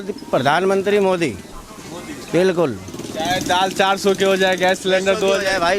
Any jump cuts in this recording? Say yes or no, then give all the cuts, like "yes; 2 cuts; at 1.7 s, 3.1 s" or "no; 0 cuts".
no; 0 cuts